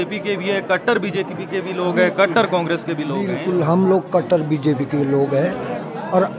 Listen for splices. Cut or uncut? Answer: uncut